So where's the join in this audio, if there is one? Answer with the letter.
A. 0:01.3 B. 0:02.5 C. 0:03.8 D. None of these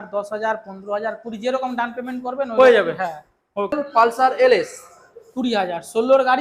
C